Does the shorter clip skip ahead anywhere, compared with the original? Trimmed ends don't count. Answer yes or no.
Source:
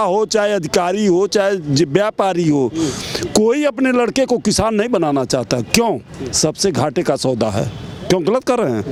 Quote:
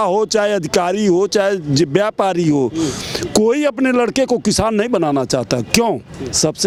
no